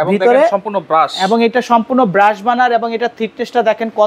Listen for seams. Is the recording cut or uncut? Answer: uncut